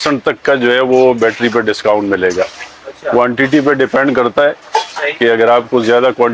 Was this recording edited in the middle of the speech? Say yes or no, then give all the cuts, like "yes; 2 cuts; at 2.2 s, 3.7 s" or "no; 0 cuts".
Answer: no; 0 cuts